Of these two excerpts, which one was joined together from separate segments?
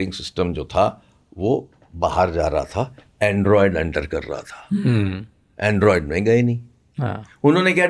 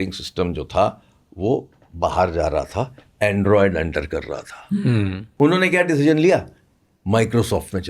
second; 1 cut; at 5.2 s

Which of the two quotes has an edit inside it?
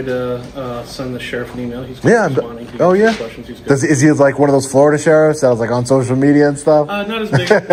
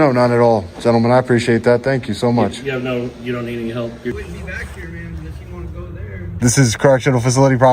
second; 2 cuts; at 4.1 s, 6.4 s

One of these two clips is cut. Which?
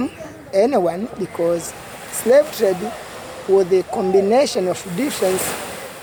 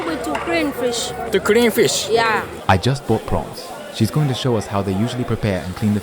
second; 2 cuts; at 1.2 s, 2.5 s

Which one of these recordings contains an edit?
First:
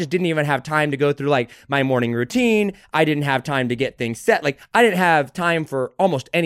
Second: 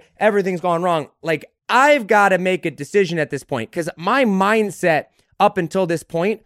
second; 1 cut; at 1.5 s

